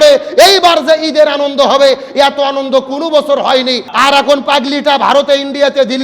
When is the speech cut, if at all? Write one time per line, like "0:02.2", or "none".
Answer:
0:03.9